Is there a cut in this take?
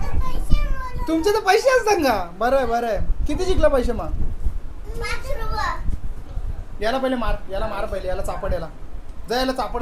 no; 0 cuts

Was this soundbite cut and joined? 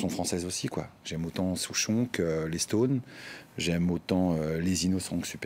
no; 0 cuts

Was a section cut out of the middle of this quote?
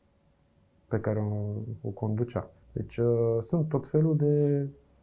yes; 1 cut; at 2.6 s

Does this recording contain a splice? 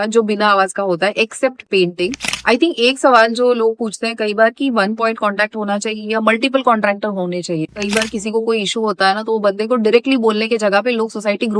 yes; 2 cuts; at 2.3 s, 7.8 s

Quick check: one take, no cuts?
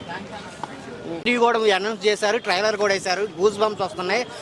no; 1 cut; at 1.1 s

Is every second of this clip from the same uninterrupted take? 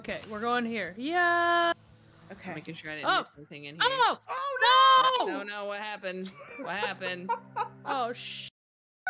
yes; 0 cuts

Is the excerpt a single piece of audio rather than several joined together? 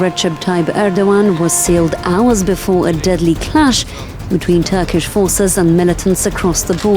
yes; 0 cuts

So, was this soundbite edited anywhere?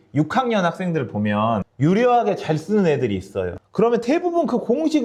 no; 0 cuts

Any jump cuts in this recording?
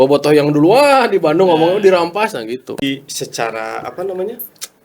yes; 1 cut; at 2.8 s

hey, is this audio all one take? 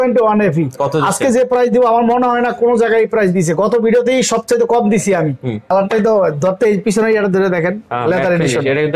no; 1 cut; at 5.6 s

